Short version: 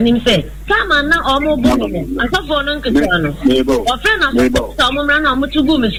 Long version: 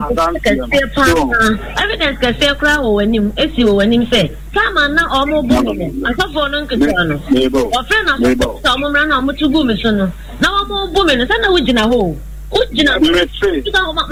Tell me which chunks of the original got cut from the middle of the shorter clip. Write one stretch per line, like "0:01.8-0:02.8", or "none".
none